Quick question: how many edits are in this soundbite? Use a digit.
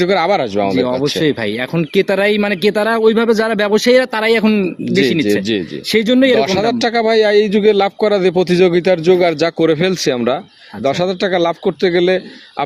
0